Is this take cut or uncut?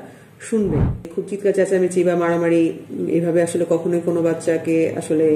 cut